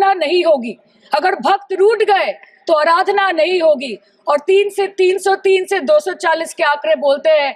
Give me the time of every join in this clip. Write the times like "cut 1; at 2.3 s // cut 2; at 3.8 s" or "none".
none